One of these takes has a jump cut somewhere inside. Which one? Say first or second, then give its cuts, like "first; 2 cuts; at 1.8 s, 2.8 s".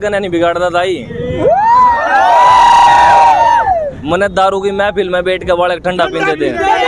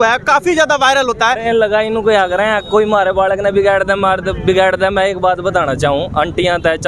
second; 1 cut; at 1.4 s